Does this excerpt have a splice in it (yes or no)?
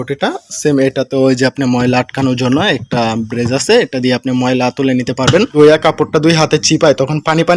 yes